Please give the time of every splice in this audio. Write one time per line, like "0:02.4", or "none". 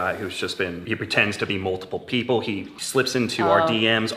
0:00.8
0:02.7